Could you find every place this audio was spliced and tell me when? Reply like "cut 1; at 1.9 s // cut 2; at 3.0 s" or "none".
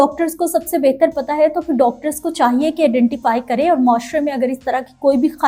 none